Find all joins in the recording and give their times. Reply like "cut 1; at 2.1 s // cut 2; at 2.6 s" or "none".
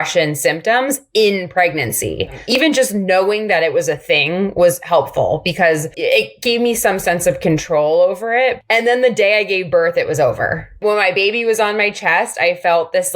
cut 1; at 2.4 s // cut 2; at 5.9 s // cut 3; at 8.6 s // cut 4; at 10.8 s